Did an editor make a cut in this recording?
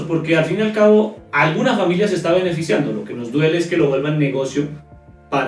no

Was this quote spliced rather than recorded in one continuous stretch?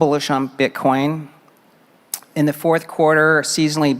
no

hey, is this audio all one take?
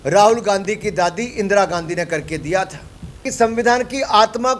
no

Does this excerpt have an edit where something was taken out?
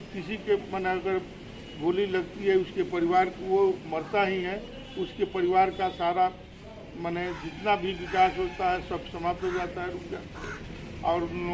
no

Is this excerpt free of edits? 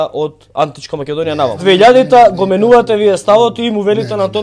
no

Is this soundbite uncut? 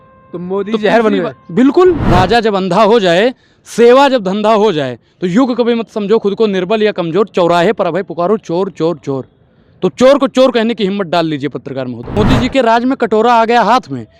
no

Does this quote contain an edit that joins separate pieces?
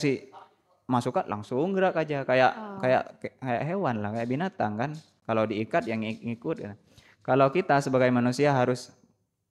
no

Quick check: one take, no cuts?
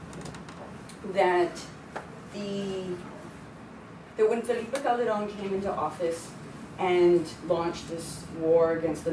no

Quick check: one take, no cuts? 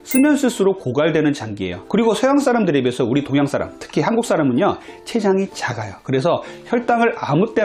yes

